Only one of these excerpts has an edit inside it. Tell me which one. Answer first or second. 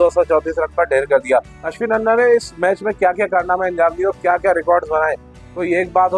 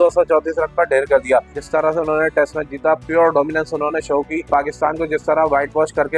second